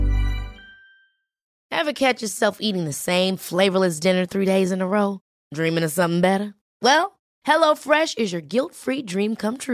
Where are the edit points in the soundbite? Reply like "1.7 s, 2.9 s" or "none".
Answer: 1.0 s